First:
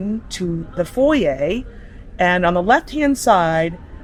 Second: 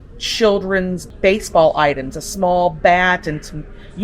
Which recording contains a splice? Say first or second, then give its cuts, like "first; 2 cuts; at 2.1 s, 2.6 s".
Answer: second; 1 cut; at 1.1 s